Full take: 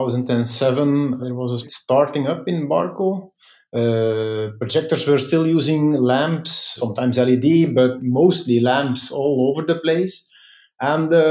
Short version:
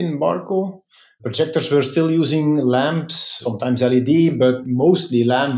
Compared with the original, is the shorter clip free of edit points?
no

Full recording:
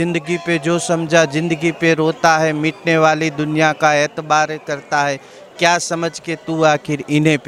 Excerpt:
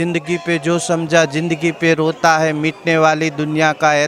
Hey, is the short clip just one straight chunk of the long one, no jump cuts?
yes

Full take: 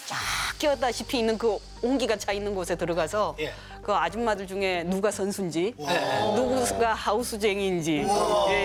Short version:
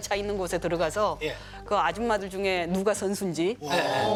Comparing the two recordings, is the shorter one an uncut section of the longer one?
yes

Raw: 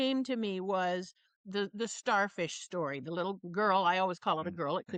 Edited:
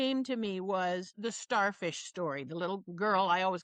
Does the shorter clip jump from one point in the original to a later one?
yes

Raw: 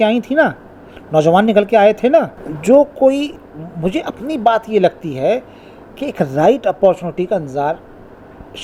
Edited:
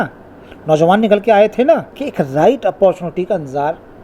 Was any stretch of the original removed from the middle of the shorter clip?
yes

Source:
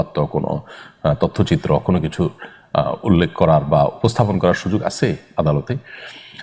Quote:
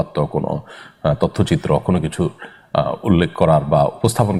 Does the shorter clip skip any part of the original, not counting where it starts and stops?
no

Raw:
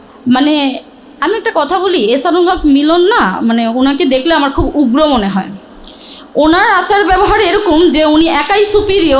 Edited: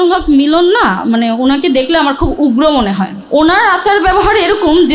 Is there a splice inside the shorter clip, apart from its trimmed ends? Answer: yes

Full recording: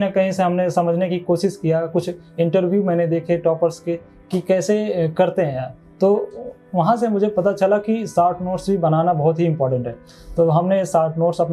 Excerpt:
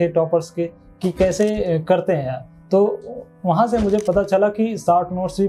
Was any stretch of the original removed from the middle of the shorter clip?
no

